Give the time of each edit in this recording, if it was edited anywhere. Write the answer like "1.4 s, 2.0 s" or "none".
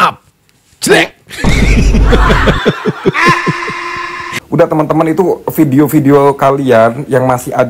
4.2 s

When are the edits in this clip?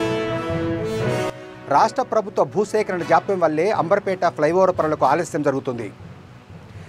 1.3 s

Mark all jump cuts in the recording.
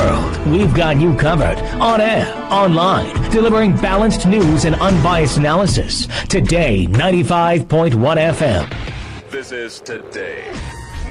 8.7 s

